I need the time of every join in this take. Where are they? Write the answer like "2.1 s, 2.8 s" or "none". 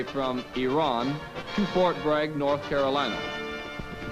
2.9 s